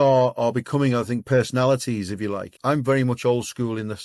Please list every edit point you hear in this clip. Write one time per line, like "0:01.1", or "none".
0:01.2
0:02.5